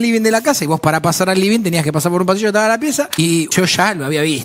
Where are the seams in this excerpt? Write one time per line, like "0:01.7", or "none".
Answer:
0:03.1